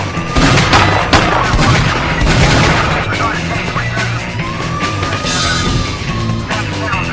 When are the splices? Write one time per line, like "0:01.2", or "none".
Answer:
none

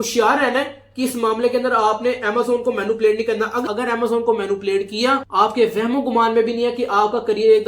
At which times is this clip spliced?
none

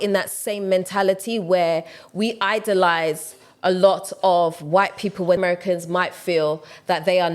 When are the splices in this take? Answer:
0:05.4

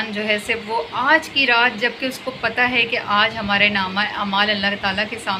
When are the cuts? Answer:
none

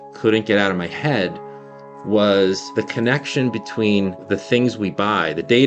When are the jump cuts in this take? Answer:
0:02.7
0:04.2

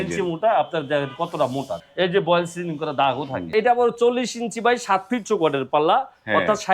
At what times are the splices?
0:01.8
0:03.5

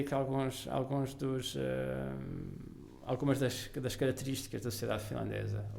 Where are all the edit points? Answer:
none

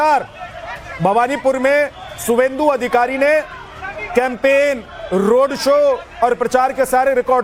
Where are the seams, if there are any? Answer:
none

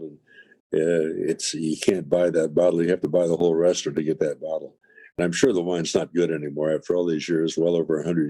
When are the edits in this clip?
none

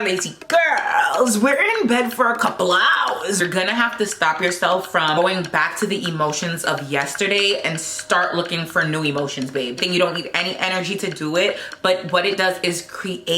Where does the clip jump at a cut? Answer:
0:03.4
0:05.2
0:09.8

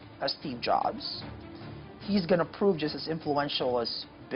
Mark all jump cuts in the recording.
none

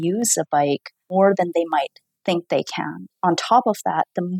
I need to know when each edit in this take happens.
0:00.9
0:03.1

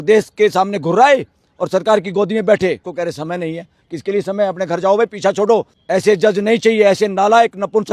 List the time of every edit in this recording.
0:02.9
0:05.8

